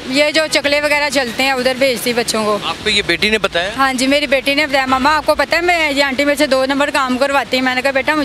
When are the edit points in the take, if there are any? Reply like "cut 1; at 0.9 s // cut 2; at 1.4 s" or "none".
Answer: cut 1; at 2.7 s